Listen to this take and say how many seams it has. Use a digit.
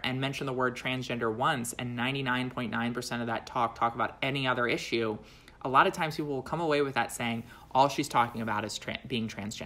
0